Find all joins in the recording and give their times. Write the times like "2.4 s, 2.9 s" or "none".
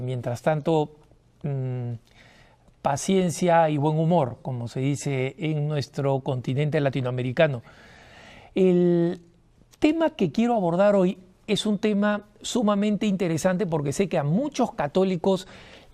6.6 s